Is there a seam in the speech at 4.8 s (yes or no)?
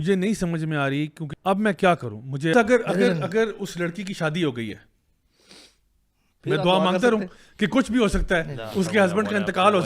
no